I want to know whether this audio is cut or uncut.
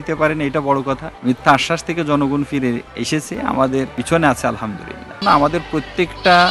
cut